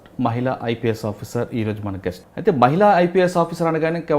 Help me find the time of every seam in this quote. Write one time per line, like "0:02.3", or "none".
0:02.3

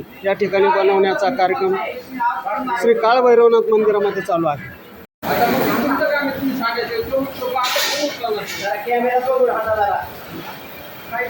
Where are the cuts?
0:05.1

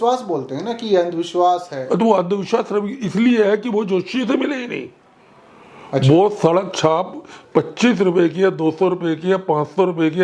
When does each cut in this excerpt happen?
none

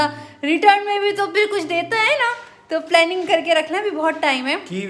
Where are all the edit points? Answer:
none

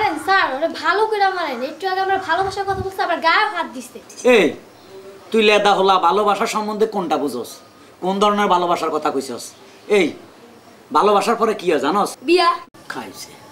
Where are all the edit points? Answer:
0:02.4

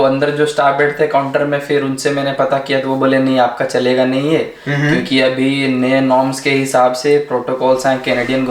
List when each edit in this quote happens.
none

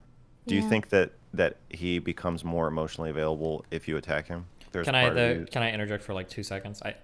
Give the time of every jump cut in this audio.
0:04.6

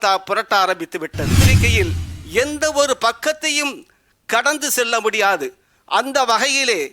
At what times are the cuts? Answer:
0:01.5

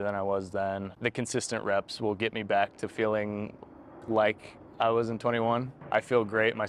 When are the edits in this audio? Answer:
0:00.9
0:05.8

